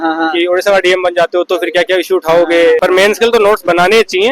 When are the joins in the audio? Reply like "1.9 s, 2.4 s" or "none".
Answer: 2.8 s